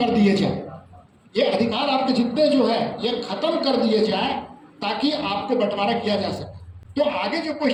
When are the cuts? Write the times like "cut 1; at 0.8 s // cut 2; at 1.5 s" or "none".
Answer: none